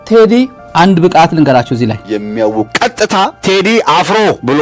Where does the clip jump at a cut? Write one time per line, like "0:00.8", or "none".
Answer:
0:02.2